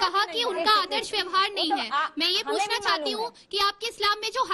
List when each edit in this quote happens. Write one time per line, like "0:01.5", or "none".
none